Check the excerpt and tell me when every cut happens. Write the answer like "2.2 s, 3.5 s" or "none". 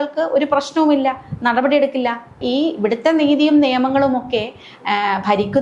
2.4 s